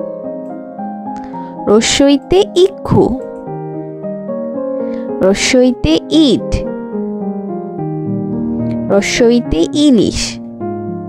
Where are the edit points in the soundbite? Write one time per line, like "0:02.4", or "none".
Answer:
0:10.2